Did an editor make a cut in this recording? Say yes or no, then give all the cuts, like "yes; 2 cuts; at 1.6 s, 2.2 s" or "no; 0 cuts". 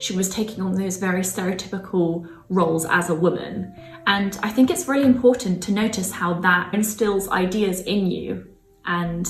no; 0 cuts